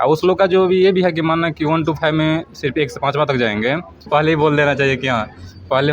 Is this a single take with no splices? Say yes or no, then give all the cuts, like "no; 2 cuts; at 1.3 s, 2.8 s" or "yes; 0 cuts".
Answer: no; 1 cut; at 4.0 s